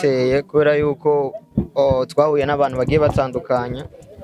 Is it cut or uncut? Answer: uncut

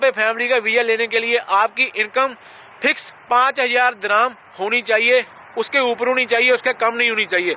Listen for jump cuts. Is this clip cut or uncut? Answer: uncut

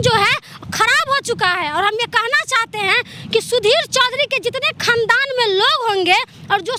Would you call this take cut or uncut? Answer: uncut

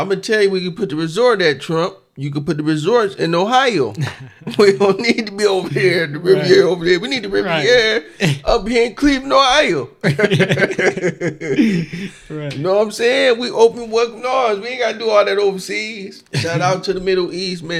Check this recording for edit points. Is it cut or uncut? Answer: uncut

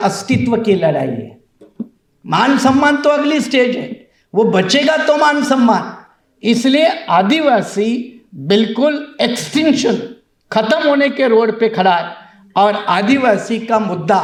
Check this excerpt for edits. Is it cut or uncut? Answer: uncut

